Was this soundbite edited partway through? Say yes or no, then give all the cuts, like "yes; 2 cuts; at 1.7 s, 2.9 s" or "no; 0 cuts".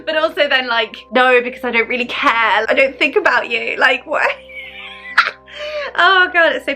yes; 1 cut; at 2.6 s